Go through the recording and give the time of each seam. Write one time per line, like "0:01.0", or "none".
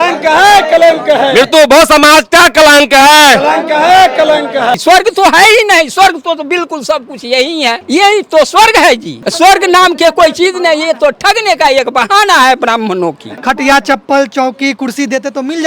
0:04.7
0:07.8
0:09.2
0:13.3